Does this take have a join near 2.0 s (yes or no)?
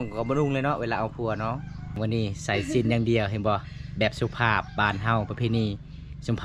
yes